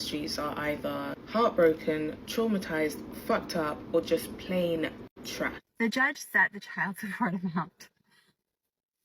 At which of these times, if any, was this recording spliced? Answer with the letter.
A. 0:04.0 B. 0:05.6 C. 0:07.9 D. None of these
B